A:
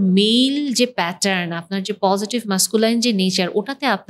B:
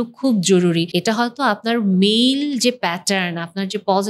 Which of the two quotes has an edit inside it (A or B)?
B